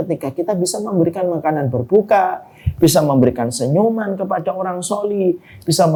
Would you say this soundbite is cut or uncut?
uncut